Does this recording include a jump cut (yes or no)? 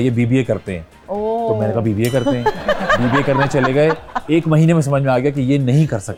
no